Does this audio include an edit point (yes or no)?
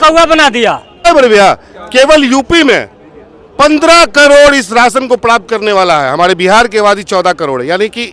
yes